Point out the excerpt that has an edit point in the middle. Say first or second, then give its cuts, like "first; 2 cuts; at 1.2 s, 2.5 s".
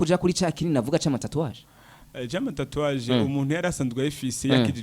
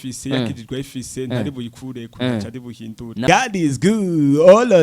second; 1 cut; at 3.2 s